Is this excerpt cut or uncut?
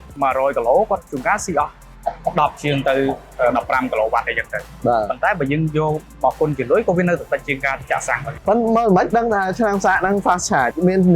cut